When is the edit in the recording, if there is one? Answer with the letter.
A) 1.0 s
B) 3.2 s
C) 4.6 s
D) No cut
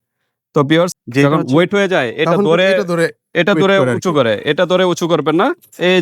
A